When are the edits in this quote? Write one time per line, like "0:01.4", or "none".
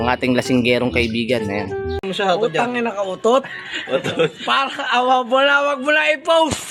none